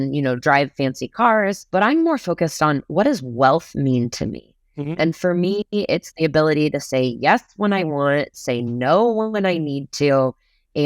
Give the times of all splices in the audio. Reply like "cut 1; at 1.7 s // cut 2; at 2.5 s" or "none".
cut 1; at 1.6 s